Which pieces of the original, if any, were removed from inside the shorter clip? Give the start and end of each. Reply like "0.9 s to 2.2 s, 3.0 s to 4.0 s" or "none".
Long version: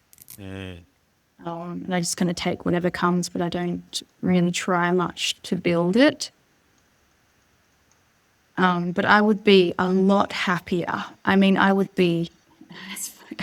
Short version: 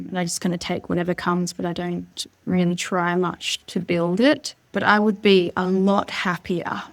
6.4 s to 8.9 s